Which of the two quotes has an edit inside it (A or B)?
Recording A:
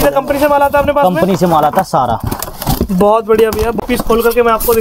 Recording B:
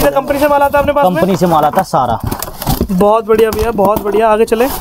A